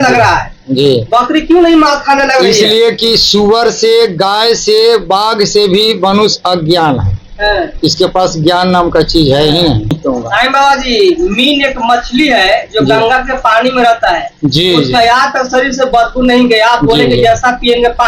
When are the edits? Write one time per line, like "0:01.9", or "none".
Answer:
0:10.0